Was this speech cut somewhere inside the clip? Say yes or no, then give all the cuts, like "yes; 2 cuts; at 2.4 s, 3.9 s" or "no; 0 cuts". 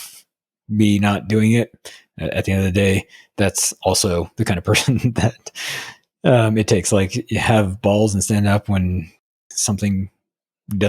yes; 1 cut; at 9.4 s